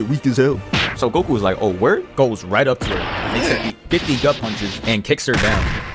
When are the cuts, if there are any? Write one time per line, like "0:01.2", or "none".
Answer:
none

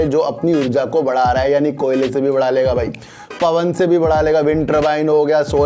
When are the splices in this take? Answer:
none

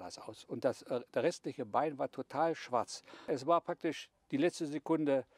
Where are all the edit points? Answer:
0:03.3

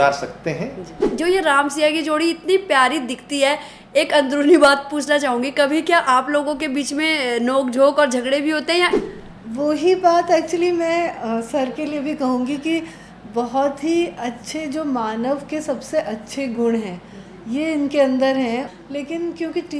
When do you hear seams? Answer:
0:01.1
0:08.9
0:18.7

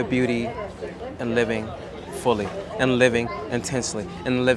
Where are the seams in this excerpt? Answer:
0:01.0

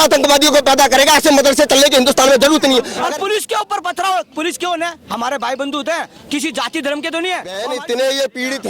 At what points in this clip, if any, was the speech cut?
0:02.9
0:07.6

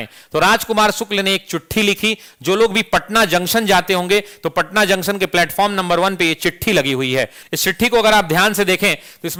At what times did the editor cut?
none

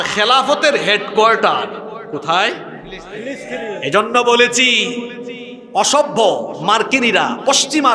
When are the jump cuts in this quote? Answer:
none

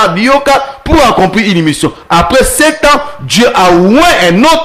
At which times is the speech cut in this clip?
none

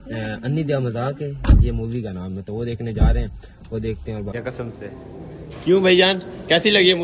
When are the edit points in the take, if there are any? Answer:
0:02.5
0:04.3

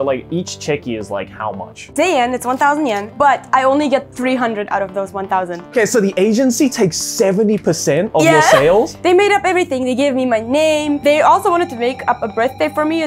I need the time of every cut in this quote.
0:05.7
0:08.9

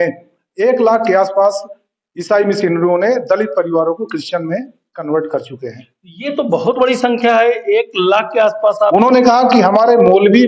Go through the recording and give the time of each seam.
0:08.9

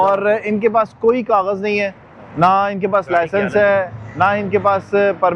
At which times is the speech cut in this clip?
none

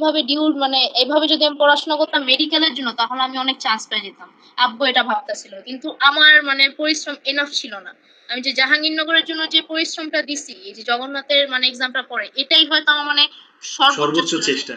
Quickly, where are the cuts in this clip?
none

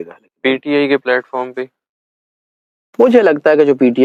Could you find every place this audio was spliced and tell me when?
none

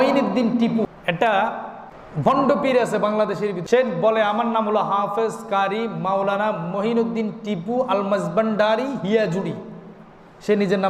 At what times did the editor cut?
0:00.8
0:02.0
0:03.6

